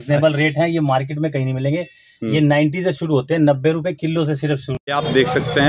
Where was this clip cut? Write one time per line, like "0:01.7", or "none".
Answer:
0:04.7